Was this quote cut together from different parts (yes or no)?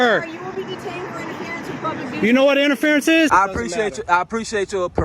yes